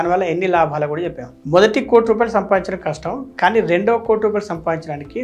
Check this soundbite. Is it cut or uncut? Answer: cut